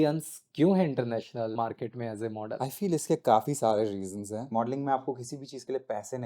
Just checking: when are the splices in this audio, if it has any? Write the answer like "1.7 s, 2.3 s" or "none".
1.5 s, 2.6 s, 4.5 s